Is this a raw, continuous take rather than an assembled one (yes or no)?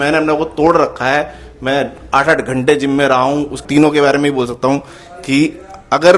no